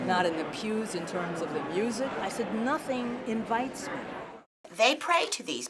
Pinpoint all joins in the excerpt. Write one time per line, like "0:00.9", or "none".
0:02.2
0:04.5